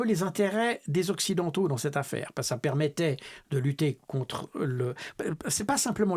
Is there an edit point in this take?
no; 0 cuts

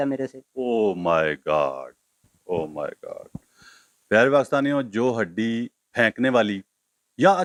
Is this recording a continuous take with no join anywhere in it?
yes; 0 cuts

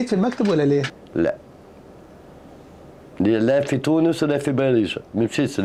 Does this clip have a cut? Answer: no; 0 cuts

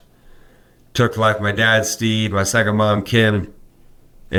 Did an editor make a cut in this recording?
no; 0 cuts

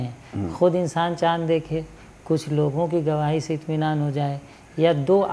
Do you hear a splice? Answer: no; 0 cuts

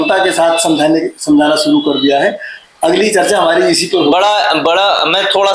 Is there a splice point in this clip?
no; 0 cuts

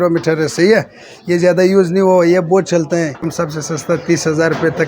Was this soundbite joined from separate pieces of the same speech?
yes; 1 cut; at 3.3 s

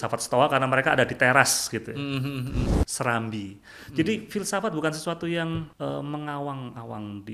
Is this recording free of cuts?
no; 2 cuts; at 2.7 s, 5.7 s

